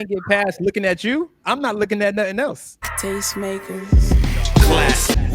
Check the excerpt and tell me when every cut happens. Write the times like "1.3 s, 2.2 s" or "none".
2.9 s